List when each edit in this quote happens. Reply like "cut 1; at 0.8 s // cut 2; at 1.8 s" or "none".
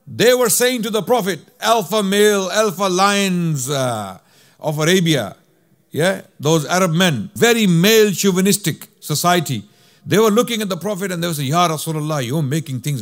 cut 1; at 1.5 s // cut 2; at 7.3 s